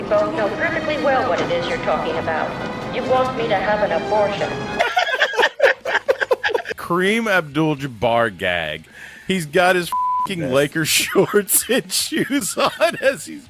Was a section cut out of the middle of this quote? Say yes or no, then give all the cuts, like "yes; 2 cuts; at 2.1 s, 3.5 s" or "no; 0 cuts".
yes; 1 cut; at 6.7 s